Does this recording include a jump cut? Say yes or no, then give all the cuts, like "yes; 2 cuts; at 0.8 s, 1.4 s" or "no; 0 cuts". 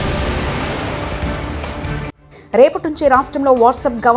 no; 0 cuts